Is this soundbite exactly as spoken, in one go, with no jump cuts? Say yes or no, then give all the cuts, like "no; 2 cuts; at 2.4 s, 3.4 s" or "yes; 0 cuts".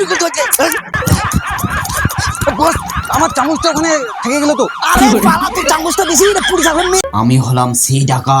no; 2 cuts; at 1.0 s, 7.0 s